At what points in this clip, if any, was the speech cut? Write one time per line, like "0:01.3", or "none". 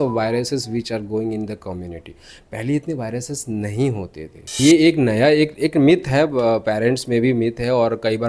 0:04.6